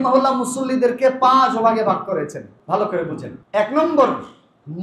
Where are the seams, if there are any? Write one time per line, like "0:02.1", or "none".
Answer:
0:02.5
0:03.3